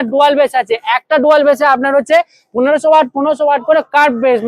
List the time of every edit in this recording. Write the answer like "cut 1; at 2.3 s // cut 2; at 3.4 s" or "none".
none

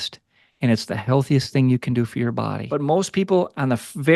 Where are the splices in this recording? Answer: cut 1; at 2.6 s

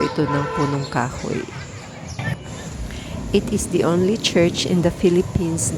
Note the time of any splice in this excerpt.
cut 1; at 2.2 s

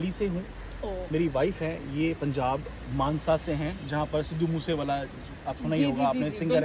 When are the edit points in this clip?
none

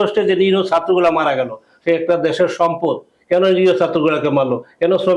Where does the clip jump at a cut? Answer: none

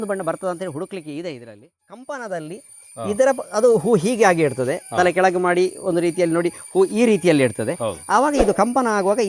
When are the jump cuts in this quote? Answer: cut 1; at 1.8 s

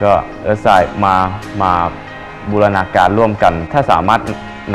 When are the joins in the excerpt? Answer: cut 1; at 3.6 s

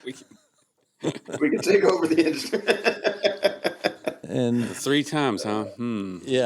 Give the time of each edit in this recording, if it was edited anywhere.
cut 1; at 4.3 s

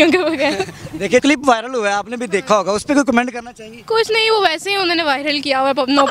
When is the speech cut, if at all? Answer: cut 1; at 1.2 s

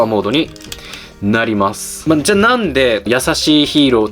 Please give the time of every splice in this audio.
cut 1; at 1.9 s // cut 2; at 3.1 s

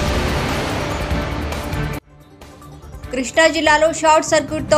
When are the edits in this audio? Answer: none

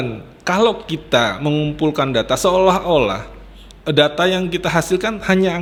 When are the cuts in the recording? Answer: none

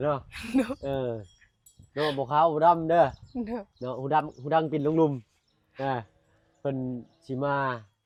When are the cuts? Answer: none

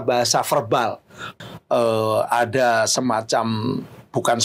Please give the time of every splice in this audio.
cut 1; at 1.3 s

